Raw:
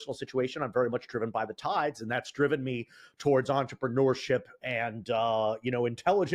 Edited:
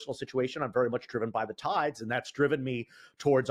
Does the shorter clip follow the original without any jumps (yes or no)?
yes